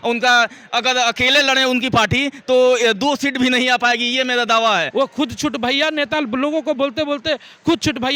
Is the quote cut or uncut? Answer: cut